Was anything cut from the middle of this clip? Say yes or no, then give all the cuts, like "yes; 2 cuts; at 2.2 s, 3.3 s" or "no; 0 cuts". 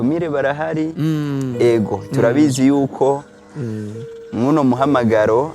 no; 0 cuts